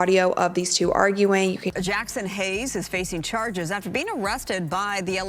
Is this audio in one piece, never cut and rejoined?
no; 1 cut; at 1.7 s

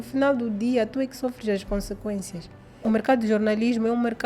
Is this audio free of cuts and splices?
no; 1 cut; at 2.8 s

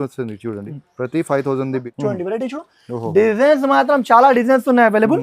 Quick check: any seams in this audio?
yes; 1 cut; at 1.8 s

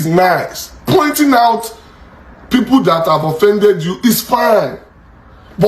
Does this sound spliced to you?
no; 0 cuts

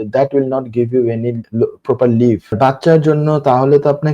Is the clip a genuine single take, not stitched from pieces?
no; 2 cuts; at 1.4 s, 2.6 s

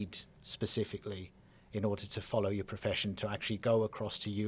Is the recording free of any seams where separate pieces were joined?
yes; 0 cuts

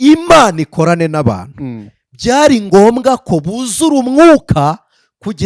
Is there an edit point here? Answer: no; 0 cuts

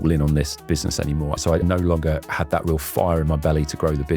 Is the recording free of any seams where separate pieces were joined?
no; 1 cut; at 1.4 s

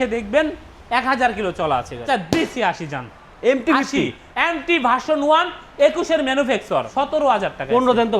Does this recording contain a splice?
yes; 2 cuts; at 2.0 s, 6.9 s

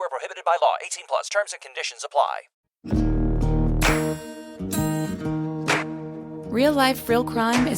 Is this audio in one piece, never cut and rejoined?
no; 1 cut; at 2.8 s

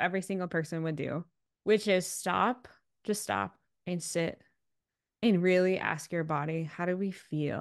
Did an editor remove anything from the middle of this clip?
yes; 1 cut; at 1.3 s

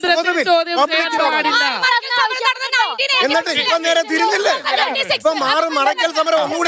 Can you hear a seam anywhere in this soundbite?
no; 0 cuts

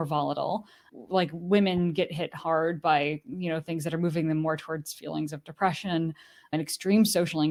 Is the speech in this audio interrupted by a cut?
no; 0 cuts

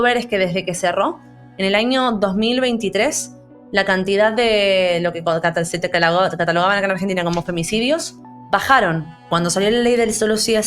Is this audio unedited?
no; 1 cut; at 9.3 s

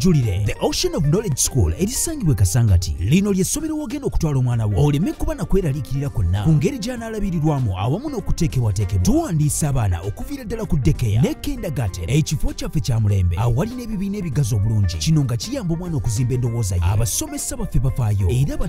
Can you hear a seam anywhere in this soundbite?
no; 0 cuts

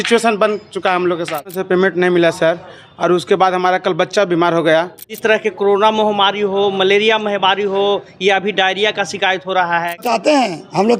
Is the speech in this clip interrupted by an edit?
yes; 3 cuts; at 1.6 s, 5.2 s, 10.1 s

